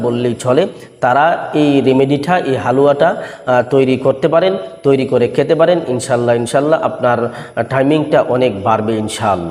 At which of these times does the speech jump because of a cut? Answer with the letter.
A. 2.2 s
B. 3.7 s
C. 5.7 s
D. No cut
D